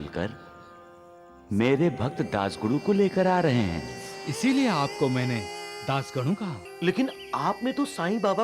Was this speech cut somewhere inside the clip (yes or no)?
yes